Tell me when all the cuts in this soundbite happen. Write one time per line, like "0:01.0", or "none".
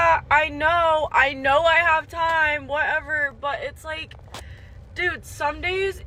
none

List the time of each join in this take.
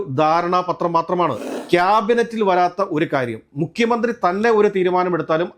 0:01.5

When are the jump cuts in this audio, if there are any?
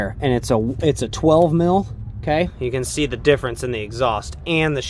0:02.5

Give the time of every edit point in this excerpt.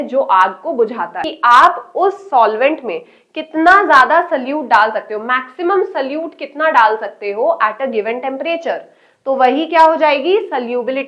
0:01.3

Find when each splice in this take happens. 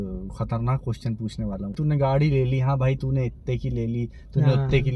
0:01.7

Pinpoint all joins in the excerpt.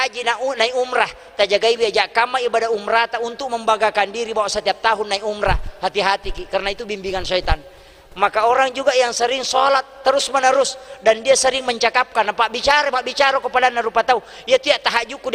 none

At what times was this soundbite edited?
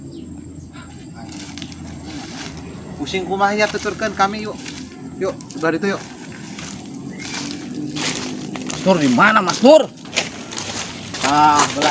0:10.0

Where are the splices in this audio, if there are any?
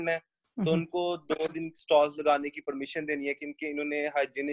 none

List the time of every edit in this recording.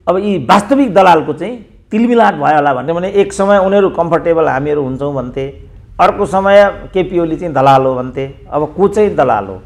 0:02.9

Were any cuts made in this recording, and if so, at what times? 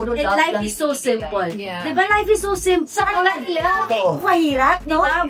none

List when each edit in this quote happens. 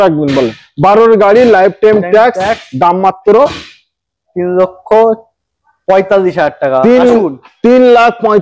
none

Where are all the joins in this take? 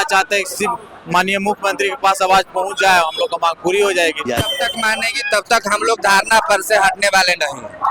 0:04.8

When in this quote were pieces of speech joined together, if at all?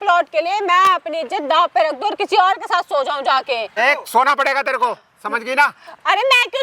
none

